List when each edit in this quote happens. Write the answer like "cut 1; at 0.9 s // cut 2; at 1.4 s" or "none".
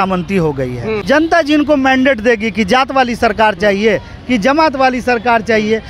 cut 1; at 1.0 s